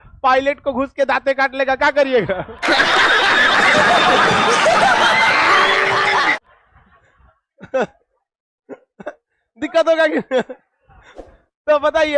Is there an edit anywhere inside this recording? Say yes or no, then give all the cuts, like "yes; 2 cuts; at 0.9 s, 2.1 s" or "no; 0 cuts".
no; 0 cuts